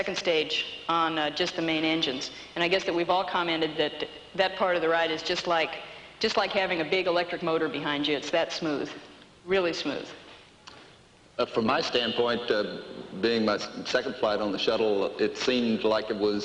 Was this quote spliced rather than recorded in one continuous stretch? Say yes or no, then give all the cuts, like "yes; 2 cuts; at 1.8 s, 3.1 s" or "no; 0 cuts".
yes; 1 cut; at 2.4 s